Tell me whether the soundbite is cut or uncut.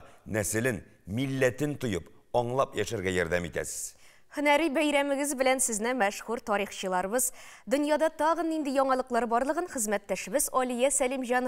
uncut